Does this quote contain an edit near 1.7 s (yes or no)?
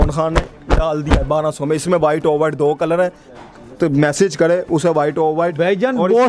no